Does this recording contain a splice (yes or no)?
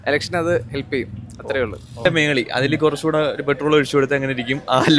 yes